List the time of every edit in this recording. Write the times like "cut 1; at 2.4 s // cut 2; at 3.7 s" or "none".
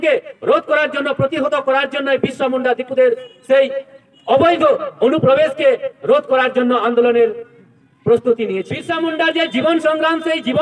cut 1; at 8.8 s